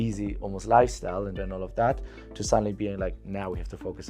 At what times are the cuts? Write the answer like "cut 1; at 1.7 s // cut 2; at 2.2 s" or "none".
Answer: cut 1; at 1.4 s